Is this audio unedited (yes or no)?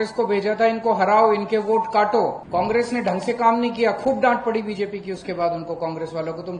no